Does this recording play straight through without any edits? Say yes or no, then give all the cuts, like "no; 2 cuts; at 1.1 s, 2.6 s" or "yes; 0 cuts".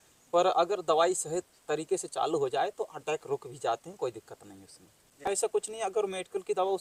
yes; 0 cuts